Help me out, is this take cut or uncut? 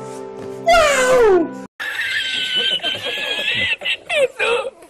cut